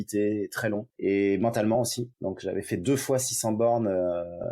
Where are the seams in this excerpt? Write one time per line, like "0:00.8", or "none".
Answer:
0:00.9
0:02.1